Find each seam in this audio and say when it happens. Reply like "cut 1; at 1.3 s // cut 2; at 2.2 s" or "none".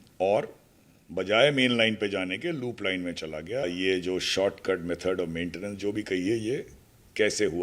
cut 1; at 3.6 s

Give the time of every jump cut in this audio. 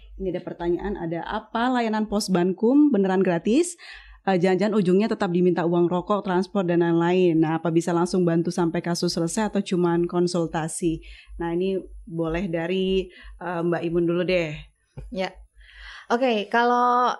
none

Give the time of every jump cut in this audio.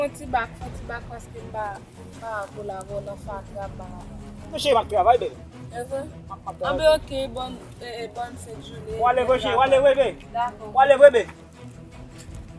cut 1; at 11.3 s

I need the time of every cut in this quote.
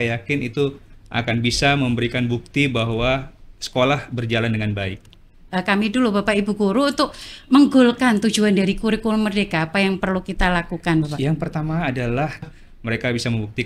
cut 1; at 5.4 s // cut 2; at 12.4 s

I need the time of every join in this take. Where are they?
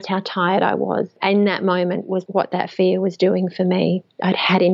cut 1; at 1.1 s // cut 2; at 2.2 s

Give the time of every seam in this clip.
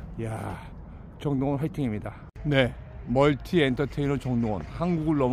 cut 1; at 2.2 s

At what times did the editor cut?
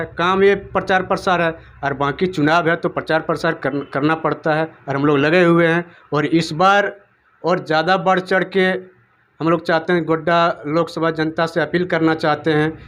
none

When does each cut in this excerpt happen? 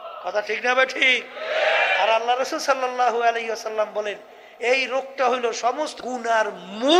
cut 1; at 6.0 s

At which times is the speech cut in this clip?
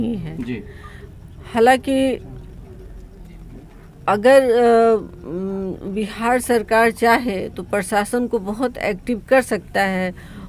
none

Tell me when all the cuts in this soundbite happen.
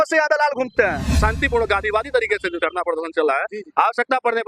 cut 1; at 1.2 s

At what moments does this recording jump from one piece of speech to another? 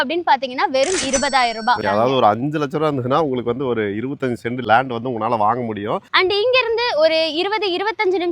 cut 1; at 1.8 s // cut 2; at 4.6 s // cut 3; at 6.0 s

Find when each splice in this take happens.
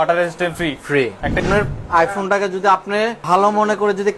cut 1; at 1.1 s // cut 2; at 3.2 s

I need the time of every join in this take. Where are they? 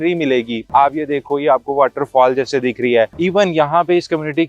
cut 1; at 3.1 s

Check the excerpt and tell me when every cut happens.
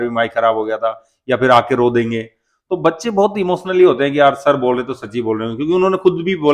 none

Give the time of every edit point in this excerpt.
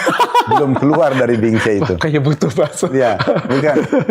none

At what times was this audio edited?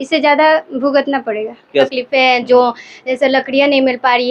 cut 1; at 1.9 s

